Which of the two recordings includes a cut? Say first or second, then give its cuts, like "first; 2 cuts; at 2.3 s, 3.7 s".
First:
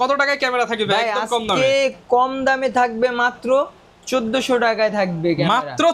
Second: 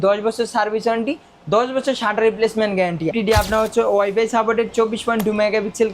second; 1 cut; at 3.1 s